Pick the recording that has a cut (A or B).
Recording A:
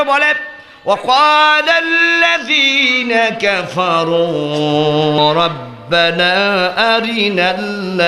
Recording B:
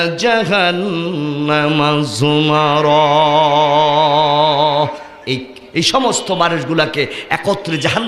A